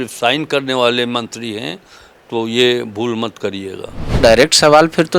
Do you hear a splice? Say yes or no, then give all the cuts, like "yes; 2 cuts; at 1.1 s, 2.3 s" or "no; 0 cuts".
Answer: yes; 1 cut; at 4.2 s